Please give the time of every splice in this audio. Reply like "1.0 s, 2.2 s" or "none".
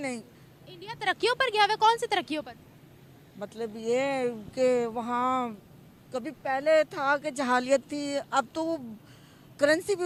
none

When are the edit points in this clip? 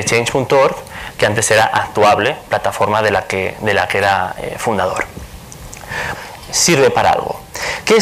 none

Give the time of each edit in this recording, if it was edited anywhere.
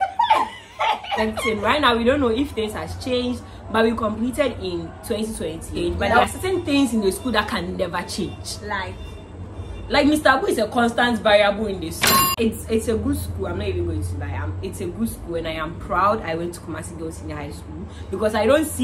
1.1 s, 6.2 s, 12.3 s

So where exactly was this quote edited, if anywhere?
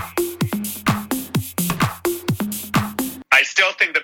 3.1 s

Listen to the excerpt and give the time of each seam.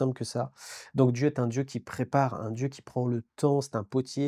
none

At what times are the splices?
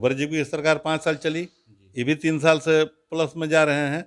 none

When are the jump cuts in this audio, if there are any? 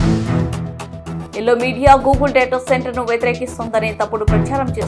none

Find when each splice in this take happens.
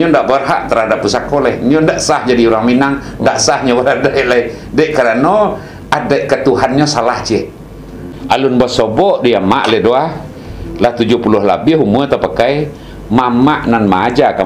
8.0 s

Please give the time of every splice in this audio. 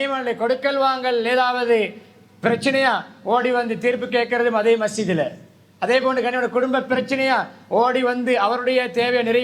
none

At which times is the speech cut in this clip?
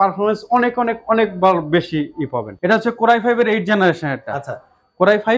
2.5 s

